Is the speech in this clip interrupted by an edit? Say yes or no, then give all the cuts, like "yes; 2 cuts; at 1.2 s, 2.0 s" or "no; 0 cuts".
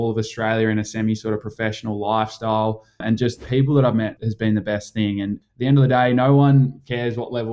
yes; 3 cuts; at 3.1 s, 4.2 s, 5.4 s